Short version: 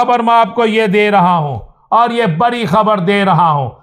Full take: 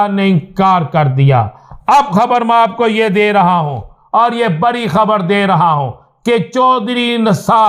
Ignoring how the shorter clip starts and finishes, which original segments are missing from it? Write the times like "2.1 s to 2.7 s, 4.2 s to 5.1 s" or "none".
none